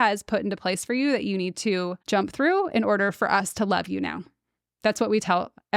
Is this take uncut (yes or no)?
no